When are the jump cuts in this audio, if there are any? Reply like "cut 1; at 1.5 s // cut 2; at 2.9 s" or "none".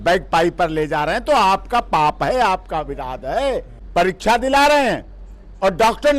cut 1; at 3.8 s